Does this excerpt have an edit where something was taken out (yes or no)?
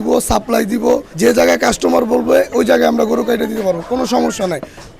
no